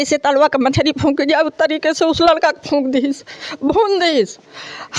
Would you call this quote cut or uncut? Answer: uncut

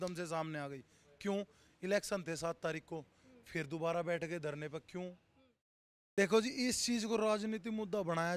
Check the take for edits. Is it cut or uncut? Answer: uncut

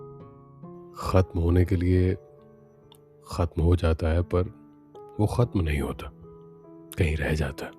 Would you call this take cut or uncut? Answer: cut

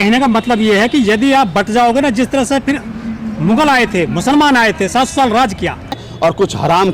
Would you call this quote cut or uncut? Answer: cut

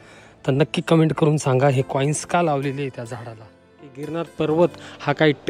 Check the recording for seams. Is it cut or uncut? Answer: cut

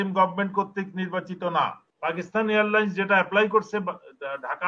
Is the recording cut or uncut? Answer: cut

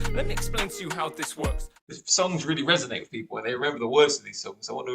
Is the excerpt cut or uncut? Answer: cut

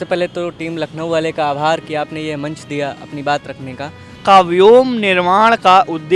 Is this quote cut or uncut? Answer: cut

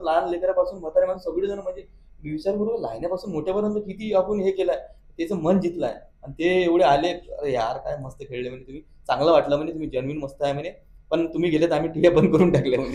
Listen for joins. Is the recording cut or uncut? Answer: uncut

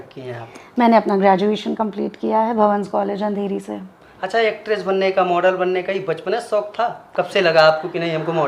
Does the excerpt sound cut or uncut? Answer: uncut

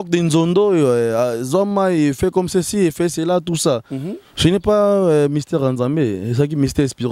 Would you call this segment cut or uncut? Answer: uncut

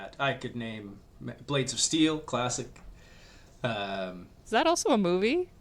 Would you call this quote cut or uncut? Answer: uncut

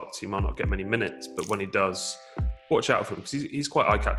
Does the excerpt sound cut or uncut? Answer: uncut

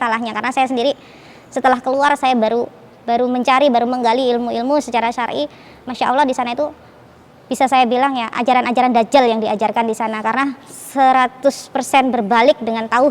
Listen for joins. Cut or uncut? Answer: uncut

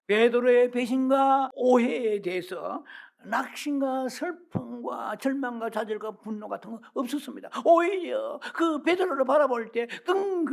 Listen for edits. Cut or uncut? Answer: cut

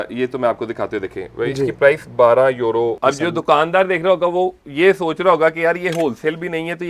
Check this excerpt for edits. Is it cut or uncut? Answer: cut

